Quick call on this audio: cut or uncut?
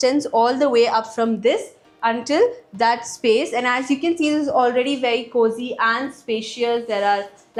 uncut